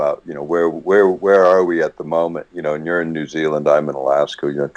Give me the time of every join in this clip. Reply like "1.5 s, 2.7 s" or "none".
2.4 s